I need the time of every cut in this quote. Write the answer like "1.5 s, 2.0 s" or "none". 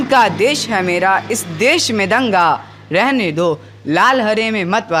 none